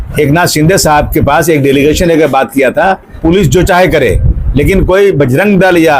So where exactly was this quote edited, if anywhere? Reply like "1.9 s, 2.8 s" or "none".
3.1 s